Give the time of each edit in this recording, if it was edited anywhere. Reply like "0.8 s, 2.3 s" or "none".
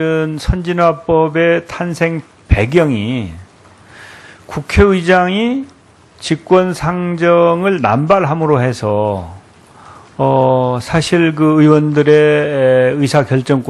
7.5 s